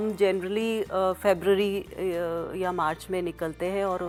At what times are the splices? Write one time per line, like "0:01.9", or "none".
none

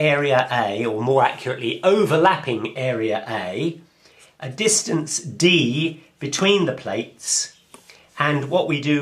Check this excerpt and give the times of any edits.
0:07.2

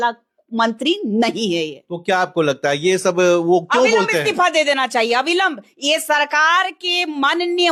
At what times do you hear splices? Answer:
none

